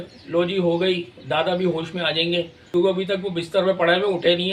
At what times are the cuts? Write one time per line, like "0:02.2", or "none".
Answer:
0:02.7